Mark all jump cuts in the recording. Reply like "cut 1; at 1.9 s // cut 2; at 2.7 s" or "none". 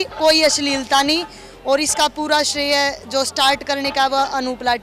none